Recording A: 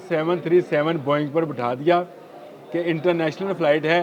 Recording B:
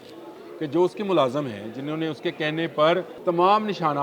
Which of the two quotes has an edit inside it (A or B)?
B